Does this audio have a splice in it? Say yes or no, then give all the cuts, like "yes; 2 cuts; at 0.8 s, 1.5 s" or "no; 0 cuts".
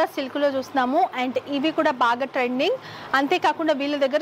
no; 0 cuts